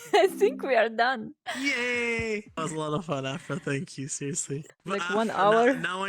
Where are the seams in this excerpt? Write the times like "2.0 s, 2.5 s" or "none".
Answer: 1.4 s, 2.6 s, 4.6 s